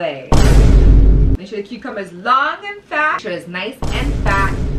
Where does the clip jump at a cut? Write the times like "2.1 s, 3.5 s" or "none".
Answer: 1.4 s, 3.2 s